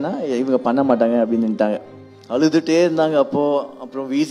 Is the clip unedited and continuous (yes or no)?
no